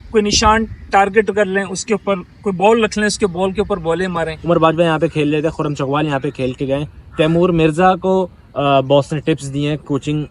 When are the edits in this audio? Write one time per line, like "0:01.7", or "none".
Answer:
0:04.3